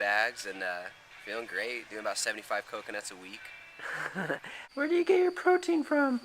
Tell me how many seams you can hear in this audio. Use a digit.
1